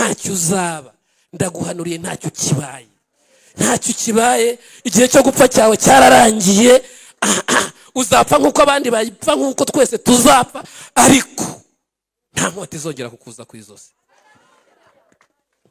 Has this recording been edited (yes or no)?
no